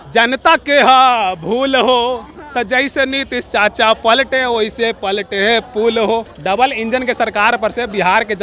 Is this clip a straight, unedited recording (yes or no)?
no